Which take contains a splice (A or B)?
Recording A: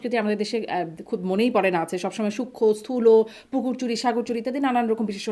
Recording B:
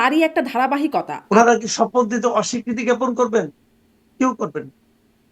B